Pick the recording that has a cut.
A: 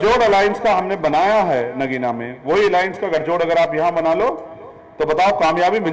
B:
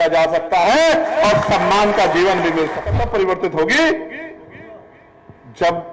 B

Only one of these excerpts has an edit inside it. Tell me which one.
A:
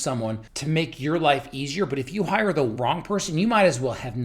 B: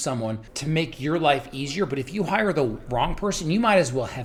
A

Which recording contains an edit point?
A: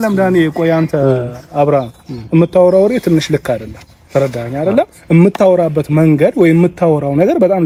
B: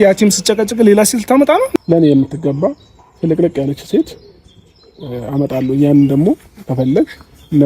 B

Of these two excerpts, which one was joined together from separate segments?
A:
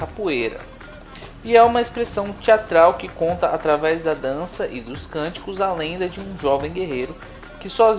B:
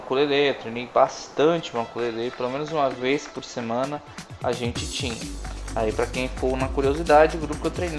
A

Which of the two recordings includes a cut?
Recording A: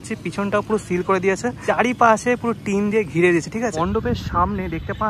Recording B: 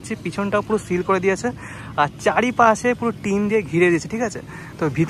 A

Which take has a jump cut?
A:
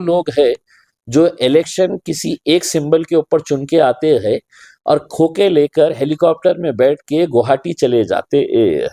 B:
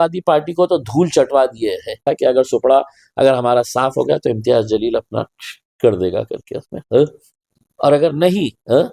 B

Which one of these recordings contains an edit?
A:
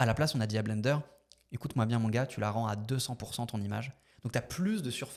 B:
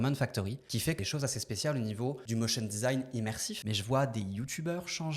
B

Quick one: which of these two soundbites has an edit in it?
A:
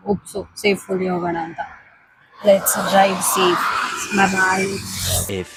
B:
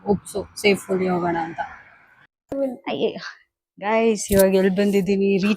B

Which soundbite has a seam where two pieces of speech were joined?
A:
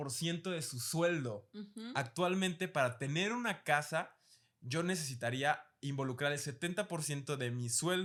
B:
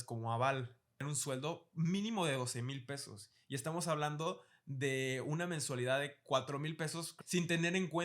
B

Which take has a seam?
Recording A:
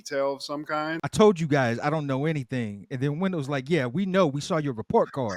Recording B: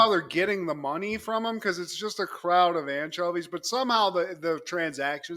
A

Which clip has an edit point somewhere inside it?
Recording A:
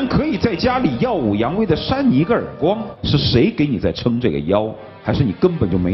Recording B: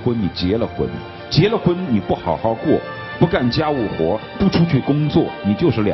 A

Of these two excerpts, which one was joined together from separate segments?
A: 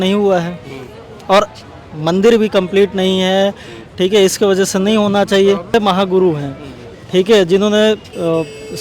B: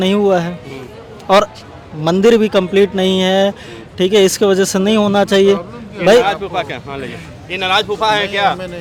A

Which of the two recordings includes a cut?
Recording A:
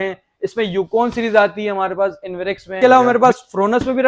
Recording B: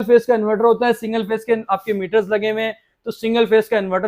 A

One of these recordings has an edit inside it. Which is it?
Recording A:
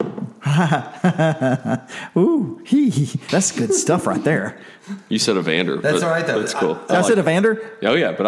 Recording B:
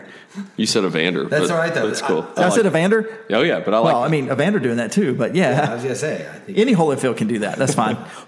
A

